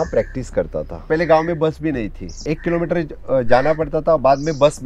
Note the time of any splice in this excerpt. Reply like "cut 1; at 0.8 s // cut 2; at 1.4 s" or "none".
cut 1; at 1.0 s // cut 2; at 2.4 s